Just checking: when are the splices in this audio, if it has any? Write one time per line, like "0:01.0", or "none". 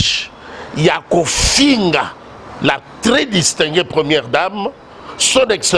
none